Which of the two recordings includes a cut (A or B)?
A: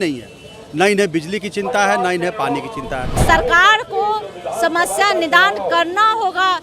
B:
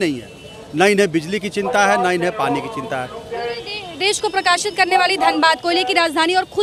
A